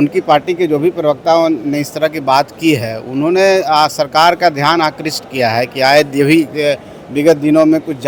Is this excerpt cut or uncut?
uncut